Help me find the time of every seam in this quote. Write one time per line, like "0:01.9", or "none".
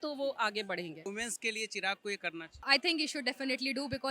0:01.0
0:02.6